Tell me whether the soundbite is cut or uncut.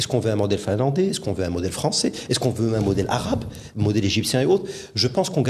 uncut